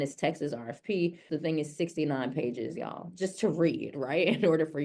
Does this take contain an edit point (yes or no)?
yes